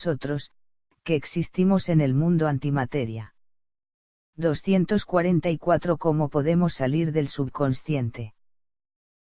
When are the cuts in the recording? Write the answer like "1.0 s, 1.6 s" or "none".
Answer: 1.1 s

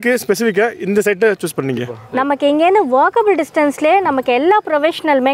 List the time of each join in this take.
1.9 s

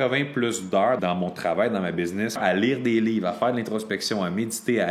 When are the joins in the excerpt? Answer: 1.0 s, 2.4 s

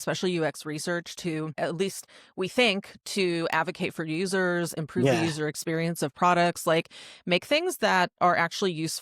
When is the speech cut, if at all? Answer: 1.6 s

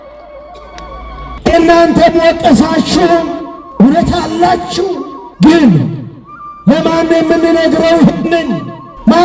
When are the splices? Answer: 1.3 s

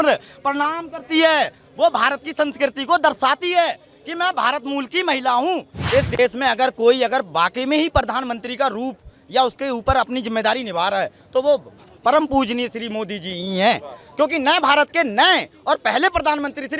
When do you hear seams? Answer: 5.8 s

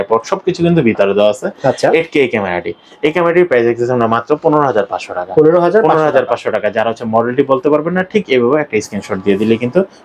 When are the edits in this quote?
none

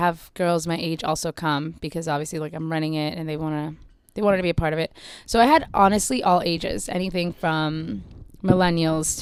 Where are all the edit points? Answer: none

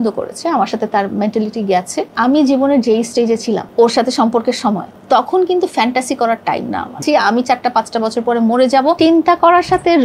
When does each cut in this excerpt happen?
2.1 s, 3.7 s, 4.9 s, 7.0 s, 9.0 s

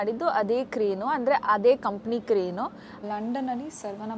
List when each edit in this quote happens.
2.9 s

